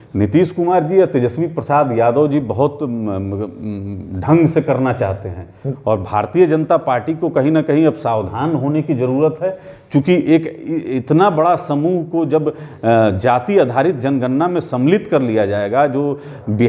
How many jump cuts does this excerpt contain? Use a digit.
0